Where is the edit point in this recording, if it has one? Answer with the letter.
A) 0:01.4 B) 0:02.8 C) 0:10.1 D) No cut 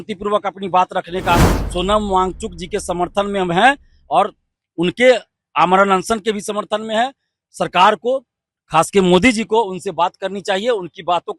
A